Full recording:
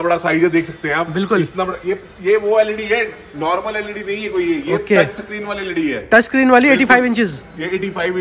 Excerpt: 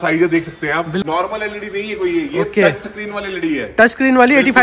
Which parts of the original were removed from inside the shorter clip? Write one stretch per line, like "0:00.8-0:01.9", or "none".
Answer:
0:01.3-0:03.4